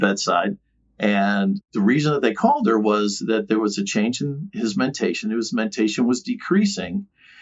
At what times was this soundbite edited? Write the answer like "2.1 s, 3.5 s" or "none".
1.7 s